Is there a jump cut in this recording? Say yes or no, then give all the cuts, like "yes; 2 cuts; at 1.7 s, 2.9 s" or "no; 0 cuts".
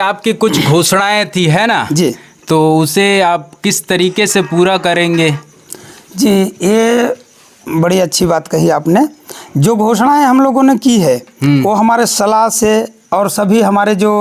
no; 0 cuts